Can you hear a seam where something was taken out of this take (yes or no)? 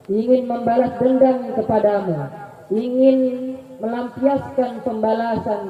no